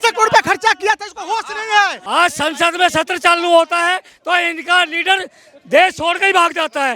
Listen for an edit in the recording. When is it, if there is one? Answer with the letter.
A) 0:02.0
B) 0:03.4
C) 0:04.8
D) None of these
A